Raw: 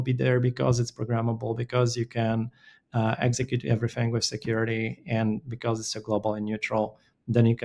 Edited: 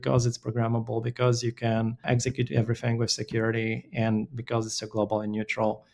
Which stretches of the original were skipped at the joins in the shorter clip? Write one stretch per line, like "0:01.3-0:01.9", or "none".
0:02.6-0:03.2